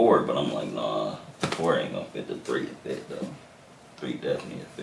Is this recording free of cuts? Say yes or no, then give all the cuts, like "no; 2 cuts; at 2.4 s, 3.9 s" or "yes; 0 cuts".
yes; 0 cuts